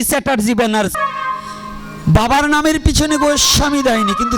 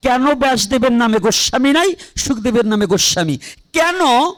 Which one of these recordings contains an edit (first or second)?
first